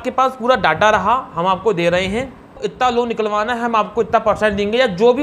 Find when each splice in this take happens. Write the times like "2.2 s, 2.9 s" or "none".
2.6 s